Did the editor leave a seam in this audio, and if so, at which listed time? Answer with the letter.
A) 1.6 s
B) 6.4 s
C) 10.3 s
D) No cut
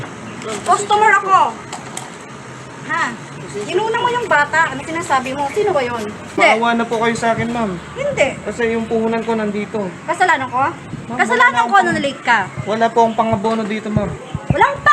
B